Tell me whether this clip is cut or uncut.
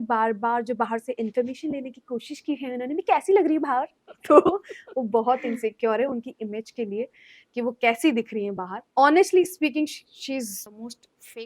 cut